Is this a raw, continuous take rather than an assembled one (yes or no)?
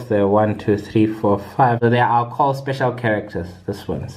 no